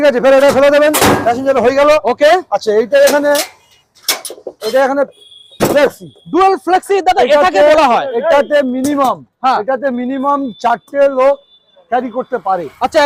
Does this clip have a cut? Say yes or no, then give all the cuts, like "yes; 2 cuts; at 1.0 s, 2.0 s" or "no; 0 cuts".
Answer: no; 0 cuts